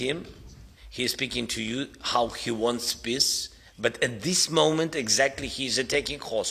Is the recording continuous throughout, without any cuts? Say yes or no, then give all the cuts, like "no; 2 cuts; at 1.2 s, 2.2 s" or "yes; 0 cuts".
yes; 0 cuts